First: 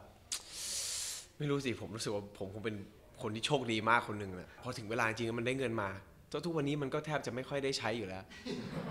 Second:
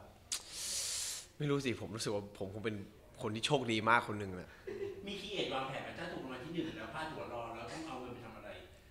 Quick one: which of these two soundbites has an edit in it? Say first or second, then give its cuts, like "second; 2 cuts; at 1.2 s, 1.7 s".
first; 1 cut; at 4.6 s